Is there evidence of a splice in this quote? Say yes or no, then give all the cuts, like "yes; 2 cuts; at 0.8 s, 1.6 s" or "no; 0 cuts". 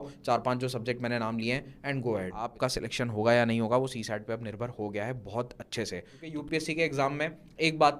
yes; 2 cuts; at 2.5 s, 6.2 s